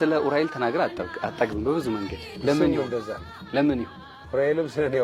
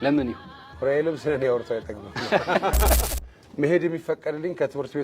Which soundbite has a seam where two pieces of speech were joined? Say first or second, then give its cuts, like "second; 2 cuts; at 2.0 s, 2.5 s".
second; 1 cut; at 3.1 s